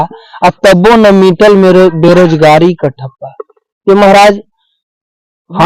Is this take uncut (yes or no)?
yes